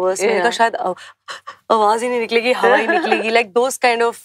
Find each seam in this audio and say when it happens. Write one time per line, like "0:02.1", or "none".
none